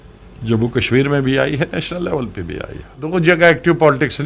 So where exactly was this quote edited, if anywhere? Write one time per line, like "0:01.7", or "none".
0:03.1